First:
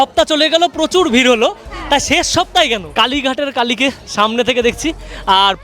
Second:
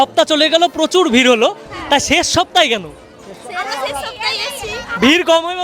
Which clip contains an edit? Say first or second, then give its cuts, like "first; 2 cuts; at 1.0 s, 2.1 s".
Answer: first; 1 cut; at 2.9 s